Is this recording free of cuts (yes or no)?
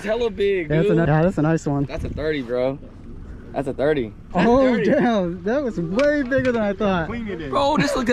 no